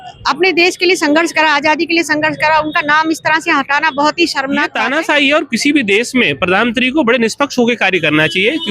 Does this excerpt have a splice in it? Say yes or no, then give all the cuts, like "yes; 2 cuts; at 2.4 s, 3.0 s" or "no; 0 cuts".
yes; 1 cut; at 4.7 s